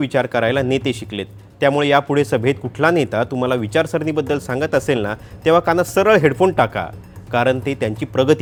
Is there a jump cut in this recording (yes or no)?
no